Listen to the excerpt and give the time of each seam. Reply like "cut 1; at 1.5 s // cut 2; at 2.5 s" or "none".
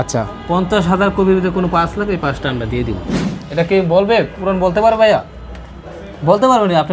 cut 1; at 3.3 s